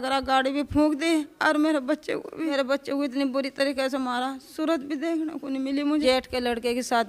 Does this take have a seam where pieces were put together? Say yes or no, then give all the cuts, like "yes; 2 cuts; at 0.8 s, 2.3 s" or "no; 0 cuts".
yes; 2 cuts; at 2.5 s, 6.0 s